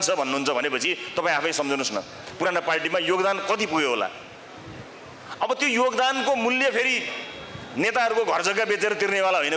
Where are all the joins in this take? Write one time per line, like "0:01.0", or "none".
none

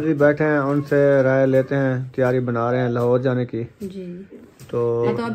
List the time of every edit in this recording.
none

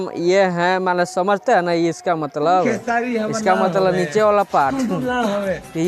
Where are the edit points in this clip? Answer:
none

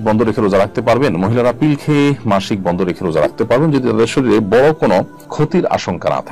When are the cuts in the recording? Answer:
none

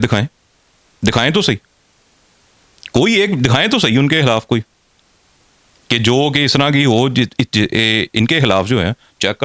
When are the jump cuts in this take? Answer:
none

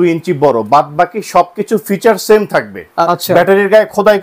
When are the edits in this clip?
0:03.1

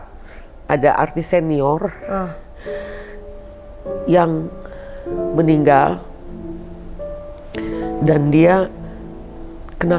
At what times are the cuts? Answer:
none

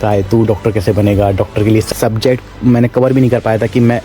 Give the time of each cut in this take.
0:01.9

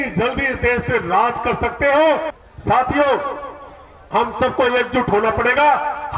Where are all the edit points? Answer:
0:02.4

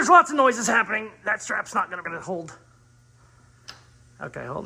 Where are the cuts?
0:02.1

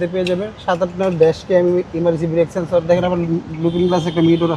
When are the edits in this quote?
none

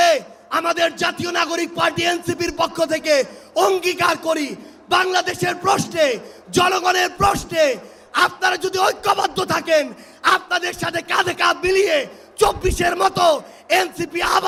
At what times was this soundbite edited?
none

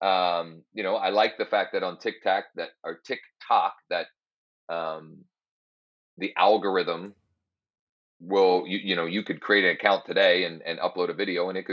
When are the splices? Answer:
none

